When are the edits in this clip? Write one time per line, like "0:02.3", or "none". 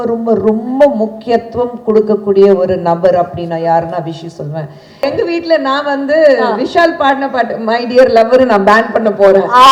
0:04.8